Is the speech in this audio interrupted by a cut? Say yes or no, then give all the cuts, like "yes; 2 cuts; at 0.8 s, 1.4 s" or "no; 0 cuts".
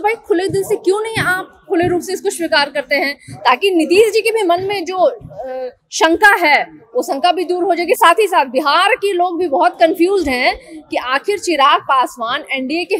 no; 0 cuts